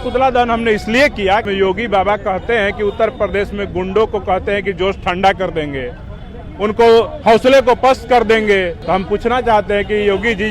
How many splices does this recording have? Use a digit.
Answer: 2